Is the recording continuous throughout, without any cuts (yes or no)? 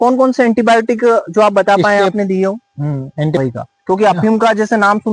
no